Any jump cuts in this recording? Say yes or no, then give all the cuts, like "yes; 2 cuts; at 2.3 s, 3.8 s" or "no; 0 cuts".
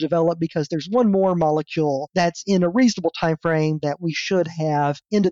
no; 0 cuts